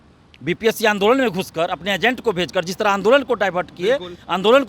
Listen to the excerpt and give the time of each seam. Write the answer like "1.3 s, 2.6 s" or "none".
none